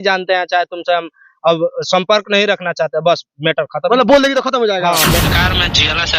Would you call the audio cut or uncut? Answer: cut